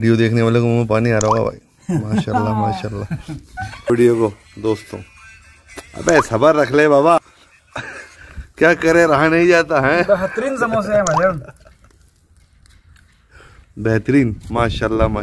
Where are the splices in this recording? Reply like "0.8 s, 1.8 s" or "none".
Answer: 3.9 s